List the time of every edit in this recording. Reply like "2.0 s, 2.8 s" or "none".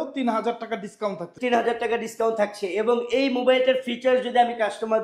1.3 s